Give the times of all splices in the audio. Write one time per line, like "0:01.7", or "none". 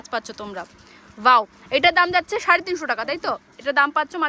none